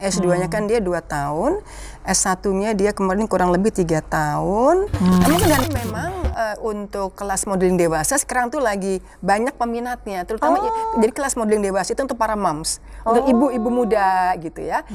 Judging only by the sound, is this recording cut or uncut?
cut